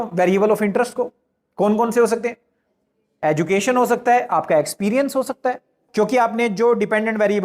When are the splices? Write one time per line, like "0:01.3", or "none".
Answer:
0:05.8